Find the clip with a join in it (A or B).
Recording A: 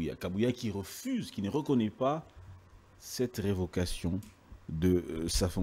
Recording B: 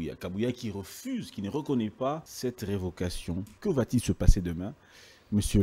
B